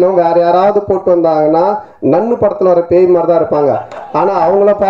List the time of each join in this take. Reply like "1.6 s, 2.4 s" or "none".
none